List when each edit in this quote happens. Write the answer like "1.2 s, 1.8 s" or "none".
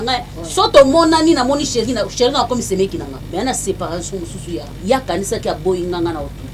3.2 s, 4.7 s

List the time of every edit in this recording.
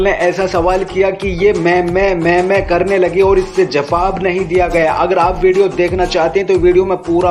none

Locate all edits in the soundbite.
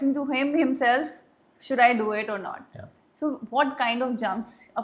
none

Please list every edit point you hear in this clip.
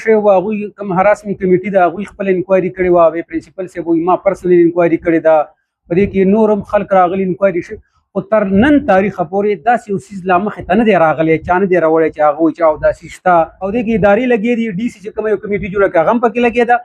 13.6 s

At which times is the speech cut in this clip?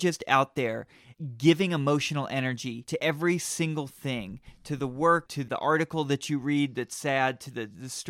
3.0 s, 5.4 s

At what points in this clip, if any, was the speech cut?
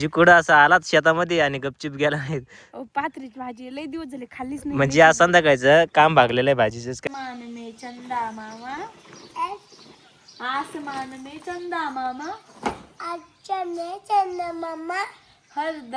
7.1 s

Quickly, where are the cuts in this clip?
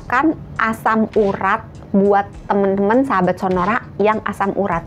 none

